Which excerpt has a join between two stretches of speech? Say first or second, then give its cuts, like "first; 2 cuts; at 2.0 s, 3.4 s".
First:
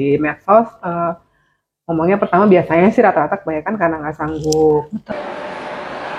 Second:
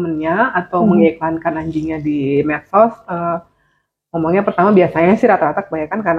first; 1 cut; at 5.0 s